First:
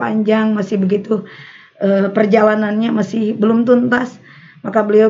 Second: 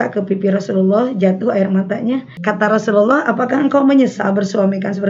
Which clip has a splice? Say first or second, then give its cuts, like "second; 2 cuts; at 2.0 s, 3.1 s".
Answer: second; 1 cut; at 2.3 s